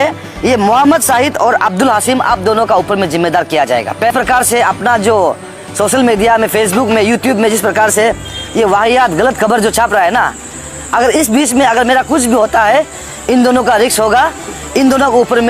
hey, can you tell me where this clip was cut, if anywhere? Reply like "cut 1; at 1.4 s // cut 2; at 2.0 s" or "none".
cut 1; at 4.1 s